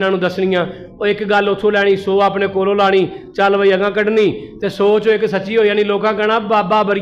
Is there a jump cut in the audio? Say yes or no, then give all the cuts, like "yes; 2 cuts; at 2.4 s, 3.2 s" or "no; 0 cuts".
no; 0 cuts